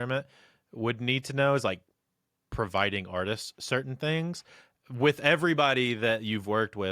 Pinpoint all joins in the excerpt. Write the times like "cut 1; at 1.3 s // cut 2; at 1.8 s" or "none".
none